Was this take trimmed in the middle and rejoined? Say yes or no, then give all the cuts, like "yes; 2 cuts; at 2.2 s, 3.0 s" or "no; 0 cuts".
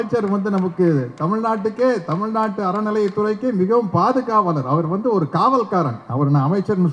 no; 0 cuts